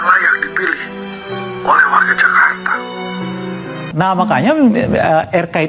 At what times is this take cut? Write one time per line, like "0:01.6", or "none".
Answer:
0:03.9

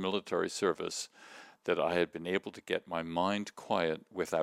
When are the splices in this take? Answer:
none

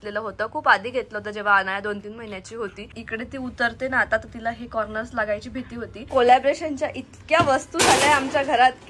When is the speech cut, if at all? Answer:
0:03.0
0:06.1

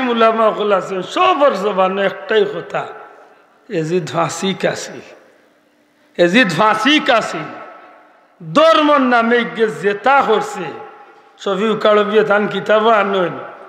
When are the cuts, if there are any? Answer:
none

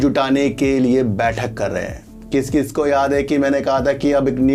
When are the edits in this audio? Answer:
none

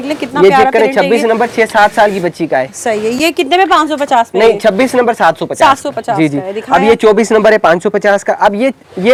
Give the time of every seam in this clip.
none

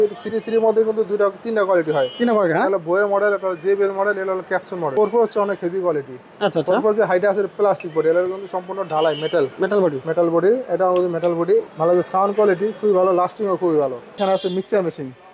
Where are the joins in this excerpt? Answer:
0:04.9
0:11.7
0:14.2

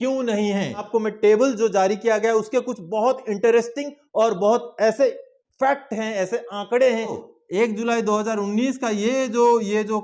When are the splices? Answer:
0:00.9
0:07.2

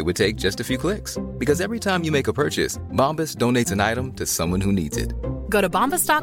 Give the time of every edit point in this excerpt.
none

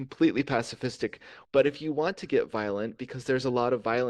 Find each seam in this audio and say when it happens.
0:01.3

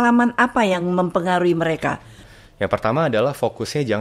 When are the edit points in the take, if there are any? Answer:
0:02.2

